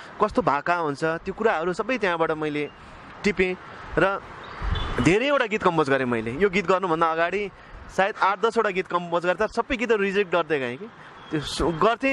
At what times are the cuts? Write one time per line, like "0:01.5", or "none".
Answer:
none